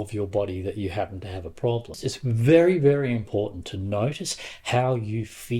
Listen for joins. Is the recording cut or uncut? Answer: cut